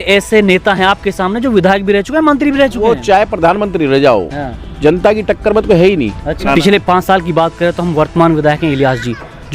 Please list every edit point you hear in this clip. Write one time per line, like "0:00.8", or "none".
0:06.3